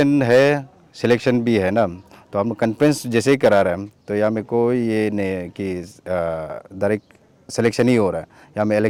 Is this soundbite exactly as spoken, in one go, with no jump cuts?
yes; 0 cuts

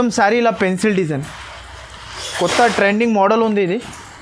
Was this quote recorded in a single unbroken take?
yes; 0 cuts

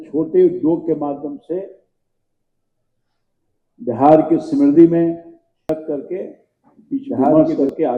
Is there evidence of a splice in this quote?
yes; 1 cut; at 5.7 s

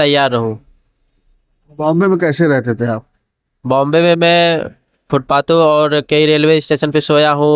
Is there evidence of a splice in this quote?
no; 0 cuts

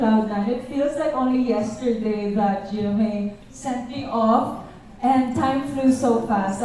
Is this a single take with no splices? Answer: yes; 0 cuts

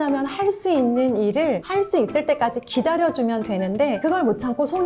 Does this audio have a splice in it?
no; 0 cuts

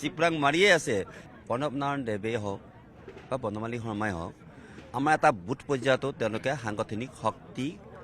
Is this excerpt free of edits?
no; 1 cut; at 1.2 s

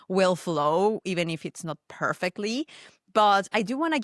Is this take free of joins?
yes; 0 cuts

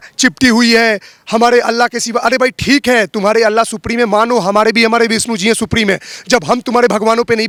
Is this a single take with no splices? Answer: yes; 0 cuts

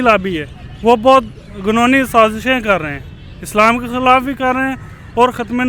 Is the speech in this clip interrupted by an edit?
no; 0 cuts

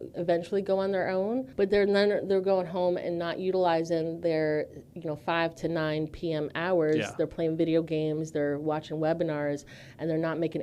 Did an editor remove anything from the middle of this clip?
yes; 1 cut; at 1.5 s

